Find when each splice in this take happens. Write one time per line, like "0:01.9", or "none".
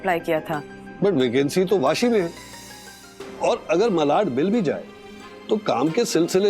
none